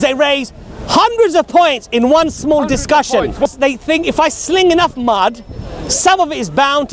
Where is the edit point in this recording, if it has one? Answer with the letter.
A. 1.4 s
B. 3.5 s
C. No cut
B